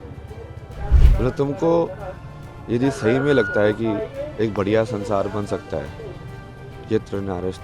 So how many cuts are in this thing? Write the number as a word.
one